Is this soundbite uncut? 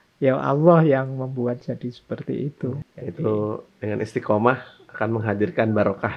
no; 1 cut; at 2.9 s

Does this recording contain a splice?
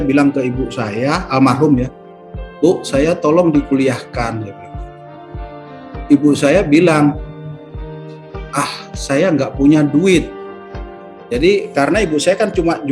no; 0 cuts

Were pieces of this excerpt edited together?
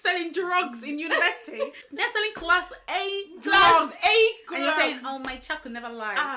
yes; 1 cut; at 1.8 s

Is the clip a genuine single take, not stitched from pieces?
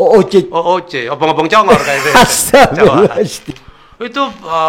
no; 1 cut; at 3.4 s

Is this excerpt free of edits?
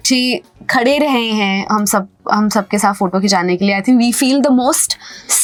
yes; 0 cuts

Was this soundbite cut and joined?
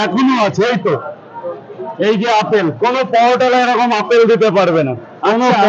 no; 0 cuts

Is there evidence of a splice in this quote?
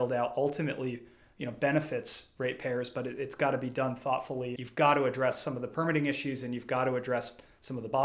yes; 1 cut; at 4.6 s

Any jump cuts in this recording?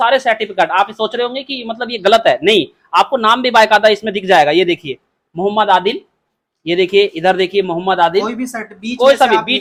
no; 0 cuts

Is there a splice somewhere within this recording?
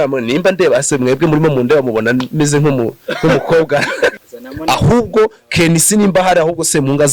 yes; 1 cut; at 4.2 s

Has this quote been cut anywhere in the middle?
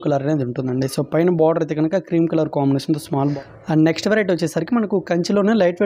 yes; 1 cut; at 3.3 s

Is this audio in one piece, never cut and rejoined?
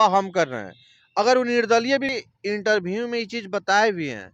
no; 1 cut; at 2.1 s

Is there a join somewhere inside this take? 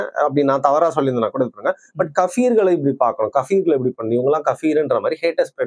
no; 0 cuts

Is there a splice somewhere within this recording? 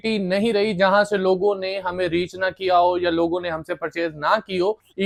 no; 0 cuts

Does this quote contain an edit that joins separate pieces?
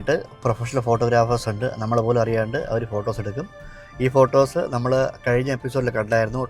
no; 0 cuts

